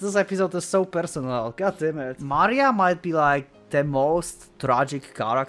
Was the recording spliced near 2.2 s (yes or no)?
yes